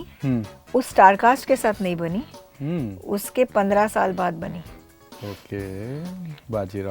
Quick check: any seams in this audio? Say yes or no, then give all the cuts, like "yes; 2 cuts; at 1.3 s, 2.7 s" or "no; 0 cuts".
no; 0 cuts